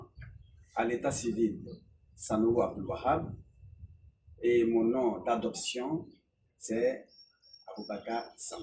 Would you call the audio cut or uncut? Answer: uncut